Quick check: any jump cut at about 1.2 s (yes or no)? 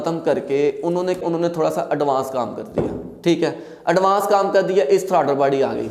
yes